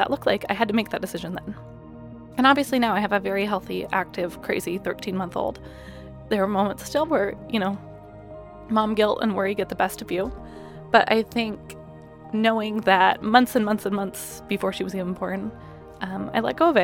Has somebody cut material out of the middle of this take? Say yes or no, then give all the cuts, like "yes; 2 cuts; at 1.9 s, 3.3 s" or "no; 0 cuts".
no; 0 cuts